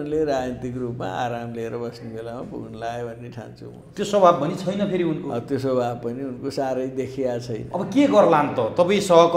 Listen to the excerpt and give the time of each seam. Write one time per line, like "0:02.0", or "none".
none